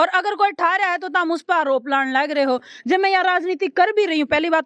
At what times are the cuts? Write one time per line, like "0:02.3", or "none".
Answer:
none